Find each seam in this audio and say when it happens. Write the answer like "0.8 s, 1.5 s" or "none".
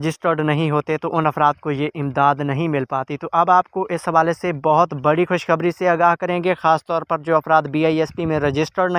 none

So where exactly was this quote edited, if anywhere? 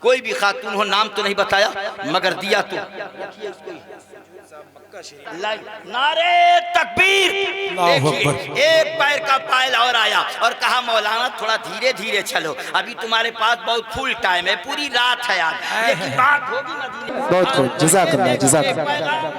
5.2 s, 17.1 s

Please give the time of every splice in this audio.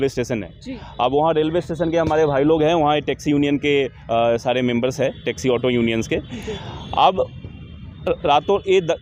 none

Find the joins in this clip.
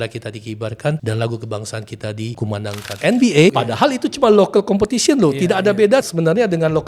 1.0 s, 2.6 s, 3.5 s, 6.1 s

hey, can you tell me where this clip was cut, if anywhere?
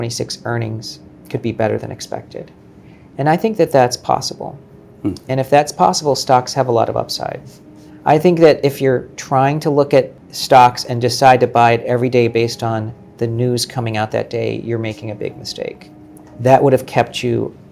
none

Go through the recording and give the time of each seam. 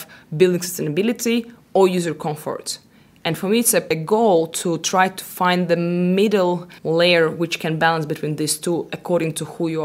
3.9 s, 6.7 s

